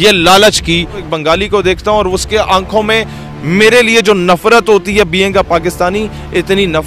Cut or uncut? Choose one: cut